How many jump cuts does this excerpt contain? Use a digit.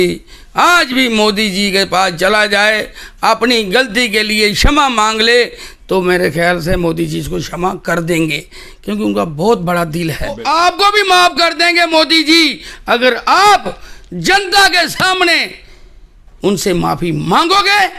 1